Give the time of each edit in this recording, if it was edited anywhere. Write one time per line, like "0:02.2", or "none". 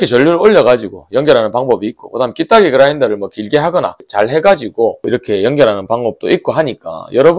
0:04.0
0:05.1